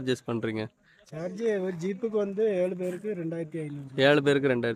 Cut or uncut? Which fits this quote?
uncut